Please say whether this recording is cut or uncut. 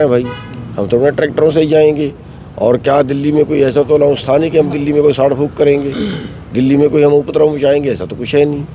uncut